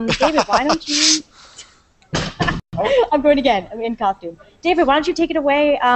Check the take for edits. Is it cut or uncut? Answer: cut